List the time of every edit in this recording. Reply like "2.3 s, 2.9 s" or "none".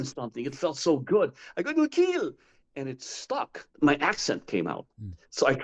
3.6 s